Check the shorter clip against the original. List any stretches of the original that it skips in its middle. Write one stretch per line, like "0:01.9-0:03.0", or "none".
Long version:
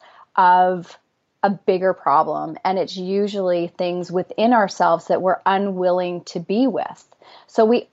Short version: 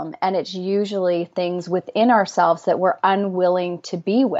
none